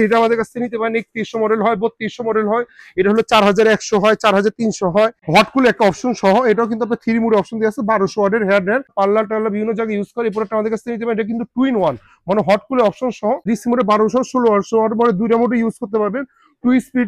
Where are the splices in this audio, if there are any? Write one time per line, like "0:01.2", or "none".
0:05.2
0:08.9
0:13.4